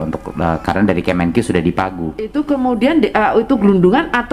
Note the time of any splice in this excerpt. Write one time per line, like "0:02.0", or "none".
0:02.3